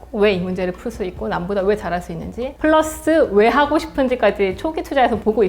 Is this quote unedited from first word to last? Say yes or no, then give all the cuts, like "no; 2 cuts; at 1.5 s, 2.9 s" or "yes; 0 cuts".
yes; 0 cuts